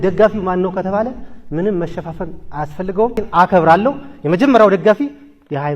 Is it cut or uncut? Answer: cut